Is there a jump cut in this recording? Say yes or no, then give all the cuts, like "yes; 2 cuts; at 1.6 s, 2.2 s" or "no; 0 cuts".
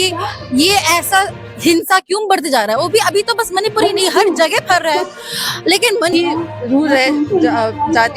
yes; 1 cut; at 6.1 s